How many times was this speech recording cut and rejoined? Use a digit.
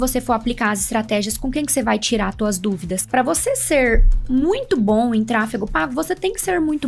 1